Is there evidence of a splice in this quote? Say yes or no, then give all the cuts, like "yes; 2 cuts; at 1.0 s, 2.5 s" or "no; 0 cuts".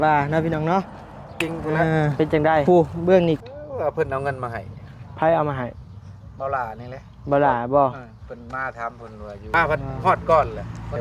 yes; 2 cuts; at 3.4 s, 9.5 s